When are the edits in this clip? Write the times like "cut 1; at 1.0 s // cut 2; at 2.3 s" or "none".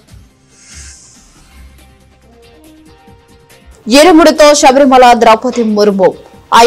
none